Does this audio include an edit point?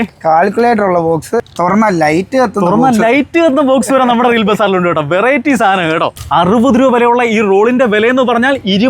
yes; 2 cuts; at 1.4 s, 6.2 s

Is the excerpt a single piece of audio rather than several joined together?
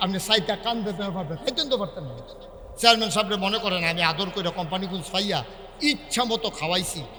yes; 0 cuts

